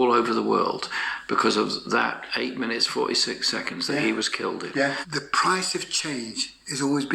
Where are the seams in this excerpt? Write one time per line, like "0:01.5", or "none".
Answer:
0:05.0